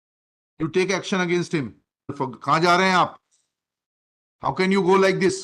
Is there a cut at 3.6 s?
no; 1 cut; at 2.1 s

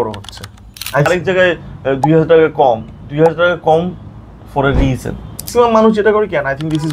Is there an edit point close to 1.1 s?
yes; 2 cuts; at 1.1 s, 5.5 s

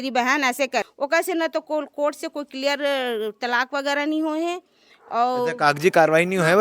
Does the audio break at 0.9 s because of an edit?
yes; 1 cut; at 0.9 s

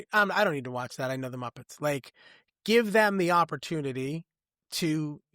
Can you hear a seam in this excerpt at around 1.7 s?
no; 0 cuts

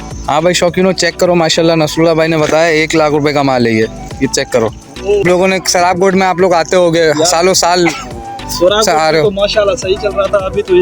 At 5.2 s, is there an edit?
yes; 1 cut; at 5.2 s

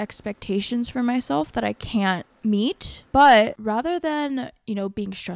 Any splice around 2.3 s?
yes; 2 cuts; at 2.3 s, 3.6 s

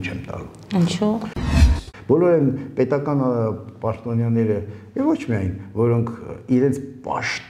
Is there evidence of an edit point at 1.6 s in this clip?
yes; 1 cut; at 1.6 s

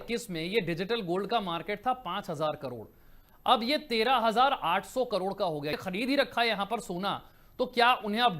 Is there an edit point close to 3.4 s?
no; 1 cut; at 5.8 s

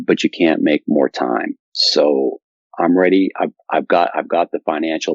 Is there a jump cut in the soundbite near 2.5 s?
yes; 1 cut; at 2.5 s

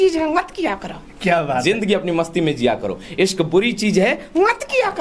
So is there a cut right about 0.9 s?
no; 0 cuts

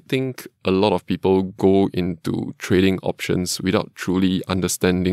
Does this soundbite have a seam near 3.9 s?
no; 0 cuts

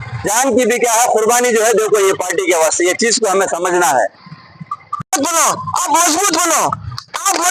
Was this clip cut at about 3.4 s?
no; 1 cut; at 5.1 s

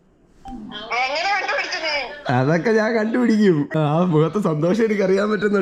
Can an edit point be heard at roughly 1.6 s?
no; 1 cut; at 3.8 s

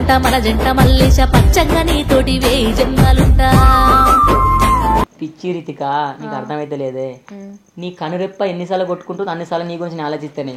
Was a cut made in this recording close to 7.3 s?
no; 1 cut; at 5.1 s

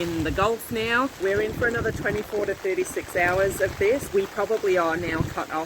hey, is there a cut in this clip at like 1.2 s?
yes; 2 cuts; at 1.2 s, 4.1 s

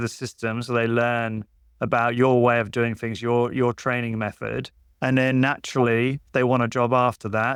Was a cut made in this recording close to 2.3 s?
no; 0 cuts

